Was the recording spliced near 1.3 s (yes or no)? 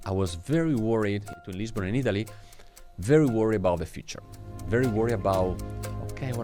yes